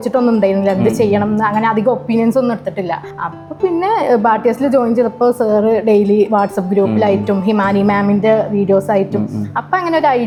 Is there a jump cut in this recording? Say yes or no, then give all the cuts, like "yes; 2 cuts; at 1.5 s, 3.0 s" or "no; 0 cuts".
no; 0 cuts